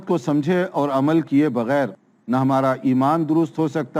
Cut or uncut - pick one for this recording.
uncut